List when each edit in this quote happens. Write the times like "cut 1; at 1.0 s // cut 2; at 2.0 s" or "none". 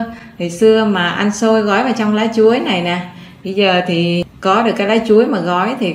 cut 1; at 4.2 s